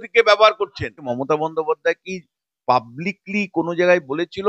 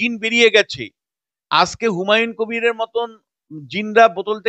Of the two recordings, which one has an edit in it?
first; 1 cut; at 1.1 s

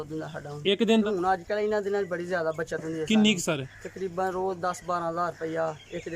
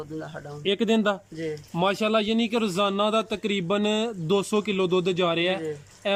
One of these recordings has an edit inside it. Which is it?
first; 1 cut; at 1.0 s

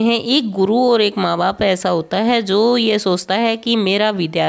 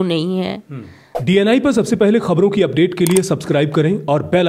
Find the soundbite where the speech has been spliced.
second; 1 cut; at 1.0 s

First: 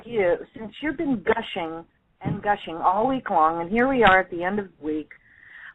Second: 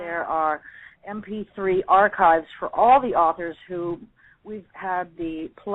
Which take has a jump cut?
second; 1 cut; at 1.5 s

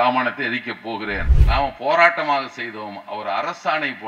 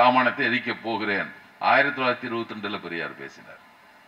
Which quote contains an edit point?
first; 1 cut; at 1.3 s

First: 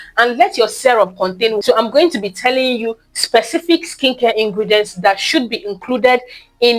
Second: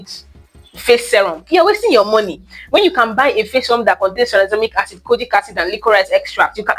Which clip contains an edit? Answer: first; 1 cut; at 1.6 s

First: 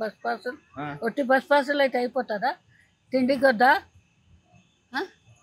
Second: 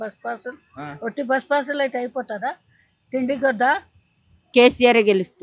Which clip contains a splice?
second; 1 cut; at 4.3 s

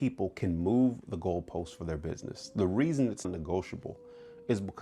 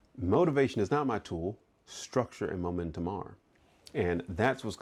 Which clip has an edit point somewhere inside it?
first; 1 cut; at 3.3 s

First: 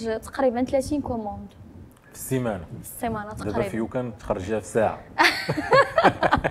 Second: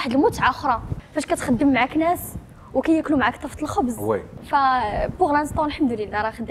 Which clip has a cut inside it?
second; 2 cuts; at 1.0 s, 4.3 s

